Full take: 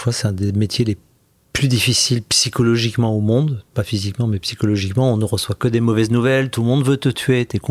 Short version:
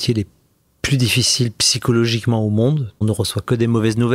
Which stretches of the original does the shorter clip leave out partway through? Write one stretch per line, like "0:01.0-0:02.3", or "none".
0:03.7-0:05.2